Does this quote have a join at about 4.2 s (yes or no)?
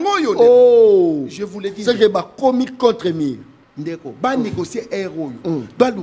no